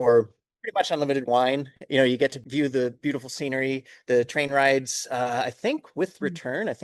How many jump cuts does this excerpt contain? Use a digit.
1